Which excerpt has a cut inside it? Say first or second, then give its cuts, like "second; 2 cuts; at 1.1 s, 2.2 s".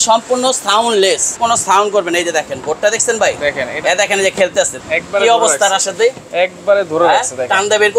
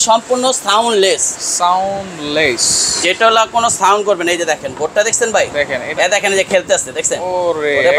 first; 2 cuts; at 1.4 s, 4.8 s